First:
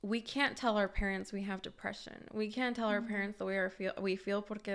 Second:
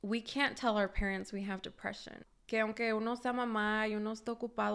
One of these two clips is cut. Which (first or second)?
second